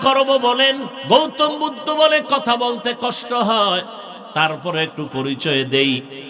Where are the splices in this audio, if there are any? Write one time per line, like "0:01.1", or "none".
0:00.9